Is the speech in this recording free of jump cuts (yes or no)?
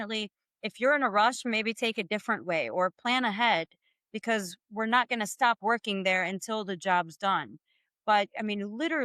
yes